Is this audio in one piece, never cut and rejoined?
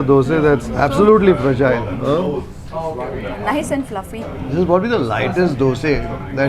no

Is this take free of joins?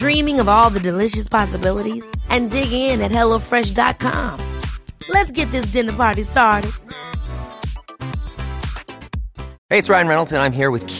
no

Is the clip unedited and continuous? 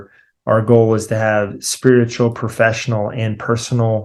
yes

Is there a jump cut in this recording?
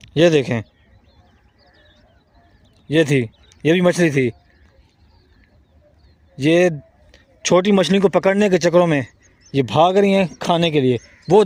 no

